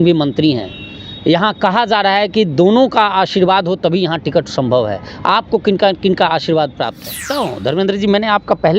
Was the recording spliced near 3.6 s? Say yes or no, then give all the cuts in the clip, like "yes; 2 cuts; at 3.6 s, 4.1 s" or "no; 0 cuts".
no; 1 cut; at 7.2 s